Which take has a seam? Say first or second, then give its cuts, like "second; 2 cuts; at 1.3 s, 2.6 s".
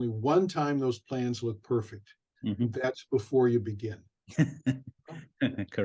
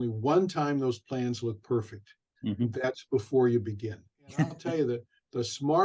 second; 1 cut; at 4.6 s